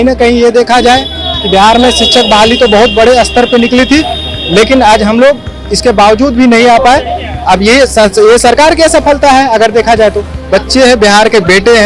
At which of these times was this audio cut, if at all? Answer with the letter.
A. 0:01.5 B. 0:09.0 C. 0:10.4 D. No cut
C